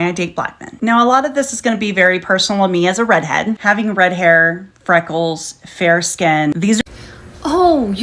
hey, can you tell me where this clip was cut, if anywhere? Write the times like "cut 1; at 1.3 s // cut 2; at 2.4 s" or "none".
cut 1; at 6.8 s